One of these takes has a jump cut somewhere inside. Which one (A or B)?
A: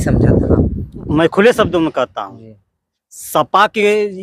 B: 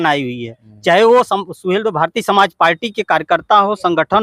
A